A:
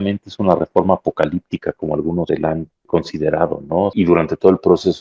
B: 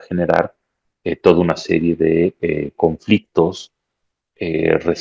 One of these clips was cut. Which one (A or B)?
A